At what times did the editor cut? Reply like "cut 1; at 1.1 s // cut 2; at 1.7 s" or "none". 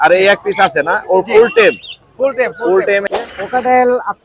cut 1; at 3.1 s